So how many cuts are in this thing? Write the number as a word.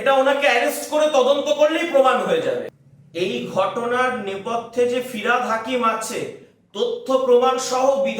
one